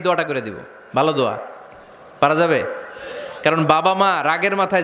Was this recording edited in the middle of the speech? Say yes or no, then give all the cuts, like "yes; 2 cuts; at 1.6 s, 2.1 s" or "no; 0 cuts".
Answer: no; 0 cuts